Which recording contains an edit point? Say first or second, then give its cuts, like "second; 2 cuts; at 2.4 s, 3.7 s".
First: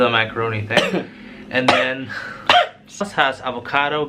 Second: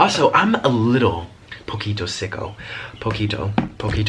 first; 1 cut; at 3.0 s